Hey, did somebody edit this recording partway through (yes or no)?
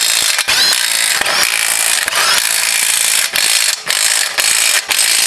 no